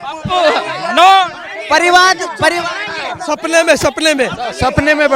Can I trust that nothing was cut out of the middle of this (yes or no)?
yes